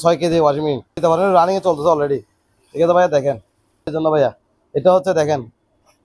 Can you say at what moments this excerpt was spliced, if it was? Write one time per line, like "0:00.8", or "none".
0:01.0
0:03.9

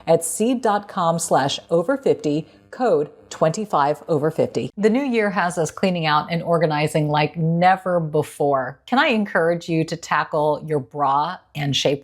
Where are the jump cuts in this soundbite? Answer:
0:04.7

